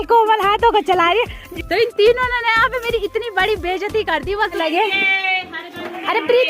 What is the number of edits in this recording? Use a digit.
2